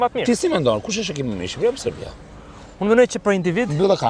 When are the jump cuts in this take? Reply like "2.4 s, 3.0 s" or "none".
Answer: none